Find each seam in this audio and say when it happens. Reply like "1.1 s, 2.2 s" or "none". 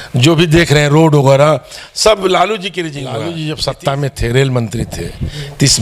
3.1 s